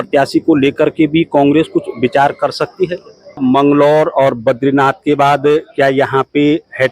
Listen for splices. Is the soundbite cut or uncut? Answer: cut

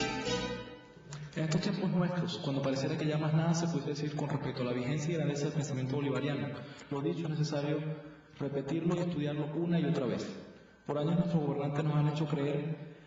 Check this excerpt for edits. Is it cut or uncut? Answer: uncut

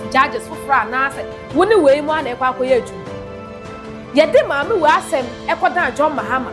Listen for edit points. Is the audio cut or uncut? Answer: uncut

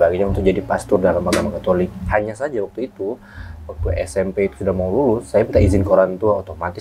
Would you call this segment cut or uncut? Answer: uncut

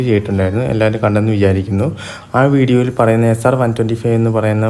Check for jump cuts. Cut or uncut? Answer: uncut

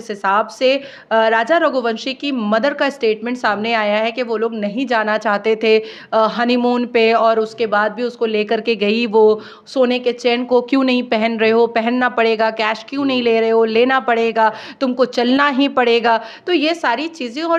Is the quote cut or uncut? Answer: uncut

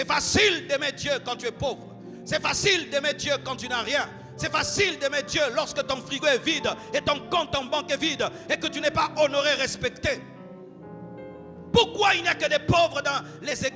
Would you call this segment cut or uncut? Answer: uncut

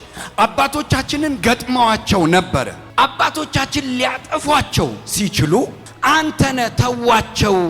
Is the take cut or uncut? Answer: cut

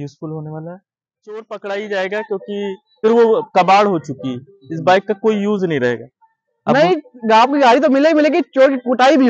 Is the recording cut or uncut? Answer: cut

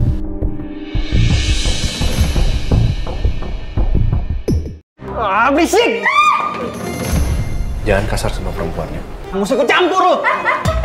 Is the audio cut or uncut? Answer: cut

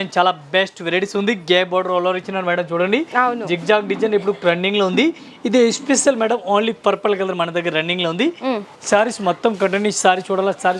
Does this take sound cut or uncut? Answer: uncut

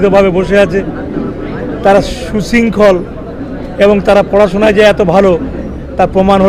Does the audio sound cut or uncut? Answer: uncut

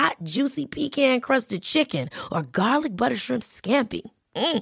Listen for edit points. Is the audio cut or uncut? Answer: uncut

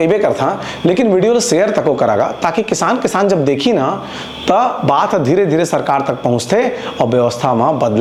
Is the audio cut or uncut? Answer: uncut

